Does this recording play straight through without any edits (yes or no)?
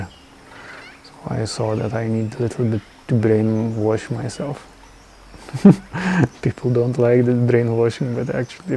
yes